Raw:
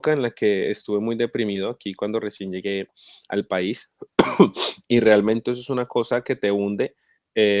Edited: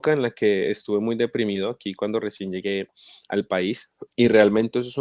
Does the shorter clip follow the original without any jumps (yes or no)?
no